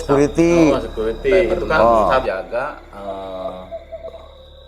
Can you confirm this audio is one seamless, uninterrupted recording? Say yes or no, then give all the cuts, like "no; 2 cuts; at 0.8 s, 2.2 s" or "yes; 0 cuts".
no; 1 cut; at 2.2 s